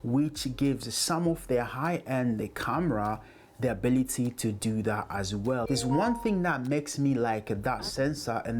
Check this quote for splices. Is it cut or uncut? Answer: cut